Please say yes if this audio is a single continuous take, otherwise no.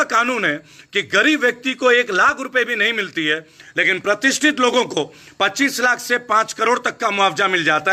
yes